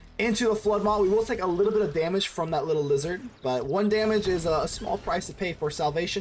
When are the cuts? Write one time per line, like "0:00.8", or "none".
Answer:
none